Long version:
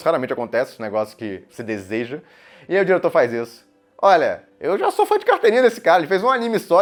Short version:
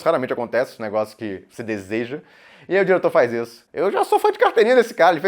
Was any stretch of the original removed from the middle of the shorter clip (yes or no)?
yes